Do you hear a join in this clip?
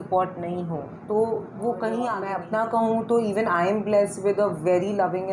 yes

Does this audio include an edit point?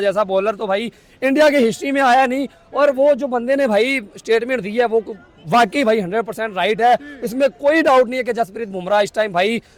no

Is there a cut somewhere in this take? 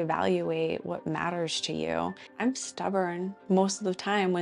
yes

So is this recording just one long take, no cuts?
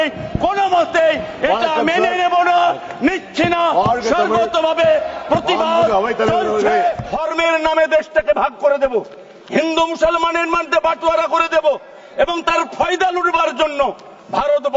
no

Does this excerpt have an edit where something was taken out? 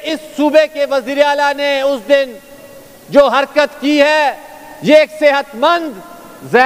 no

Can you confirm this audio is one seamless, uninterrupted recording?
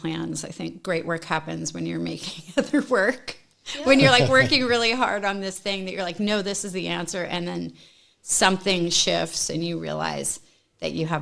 yes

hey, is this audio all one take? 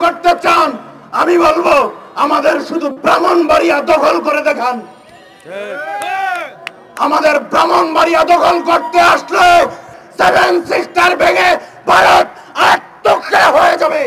no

